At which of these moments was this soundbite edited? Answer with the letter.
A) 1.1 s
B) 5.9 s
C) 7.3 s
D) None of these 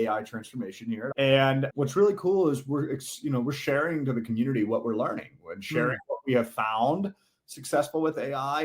A